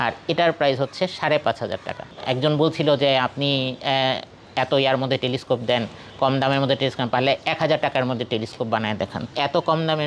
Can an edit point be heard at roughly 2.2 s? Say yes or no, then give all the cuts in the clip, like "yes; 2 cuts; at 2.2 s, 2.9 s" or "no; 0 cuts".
yes; 2 cuts; at 2.2 s, 9.3 s